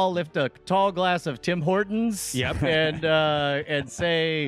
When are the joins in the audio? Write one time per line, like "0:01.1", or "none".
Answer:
none